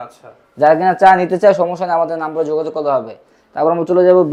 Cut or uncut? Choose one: uncut